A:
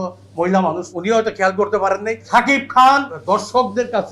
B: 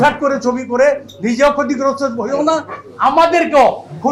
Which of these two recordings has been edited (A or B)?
A